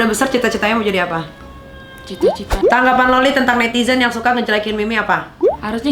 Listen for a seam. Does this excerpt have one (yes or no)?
yes